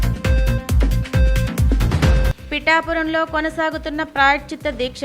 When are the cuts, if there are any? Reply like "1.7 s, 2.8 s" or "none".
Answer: none